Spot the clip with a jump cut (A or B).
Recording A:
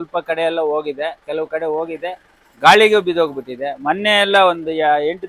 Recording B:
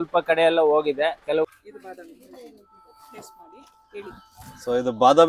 B